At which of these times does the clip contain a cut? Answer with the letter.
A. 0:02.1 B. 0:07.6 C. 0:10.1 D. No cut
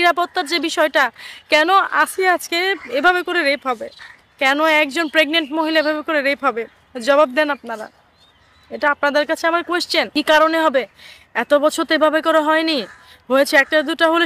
C